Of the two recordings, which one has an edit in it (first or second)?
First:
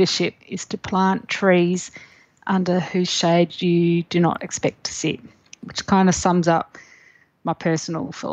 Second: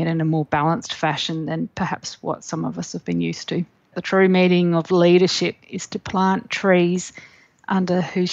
second